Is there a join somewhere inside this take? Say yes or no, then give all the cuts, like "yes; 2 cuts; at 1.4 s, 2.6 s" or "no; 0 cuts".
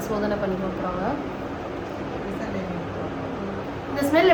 no; 0 cuts